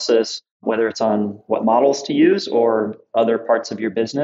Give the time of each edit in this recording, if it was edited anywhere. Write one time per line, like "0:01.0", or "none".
0:01.5
0:03.0